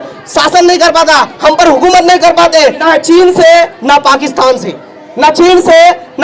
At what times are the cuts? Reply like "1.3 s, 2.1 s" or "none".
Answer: 2.8 s